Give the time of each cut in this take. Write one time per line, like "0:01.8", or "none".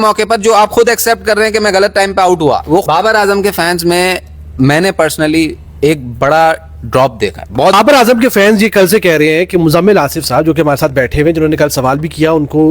0:02.8
0:07.7